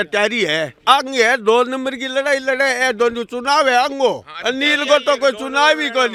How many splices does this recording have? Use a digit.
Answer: 0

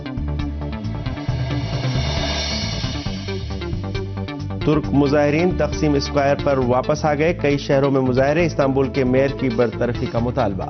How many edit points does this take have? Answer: 0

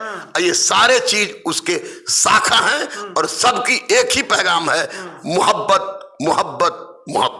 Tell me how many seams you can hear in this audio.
0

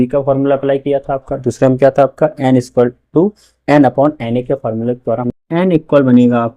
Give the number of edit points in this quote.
1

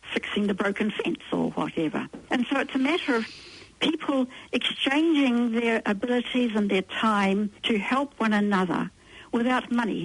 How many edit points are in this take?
1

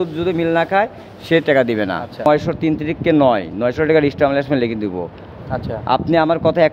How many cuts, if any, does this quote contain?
1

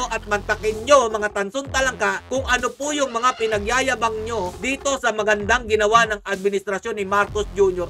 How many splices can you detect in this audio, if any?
0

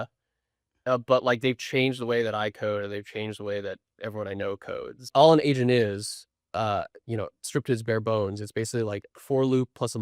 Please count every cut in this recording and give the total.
1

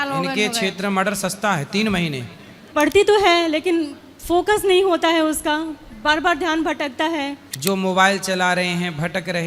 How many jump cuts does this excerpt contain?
2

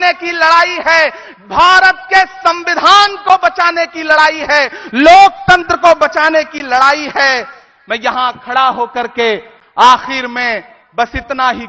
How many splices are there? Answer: 0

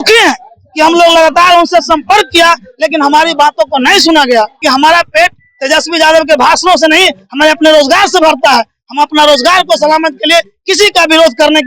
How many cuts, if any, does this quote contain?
1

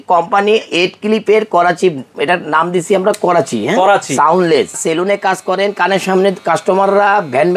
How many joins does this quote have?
1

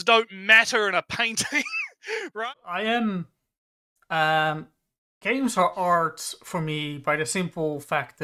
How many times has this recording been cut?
1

